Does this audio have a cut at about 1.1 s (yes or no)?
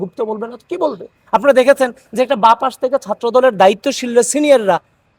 no